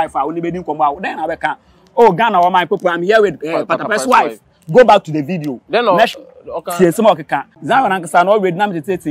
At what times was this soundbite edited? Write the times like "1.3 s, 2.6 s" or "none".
7.5 s